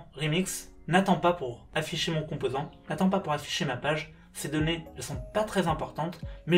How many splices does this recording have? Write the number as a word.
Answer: one